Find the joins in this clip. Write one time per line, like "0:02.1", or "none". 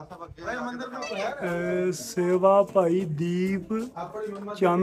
0:01.4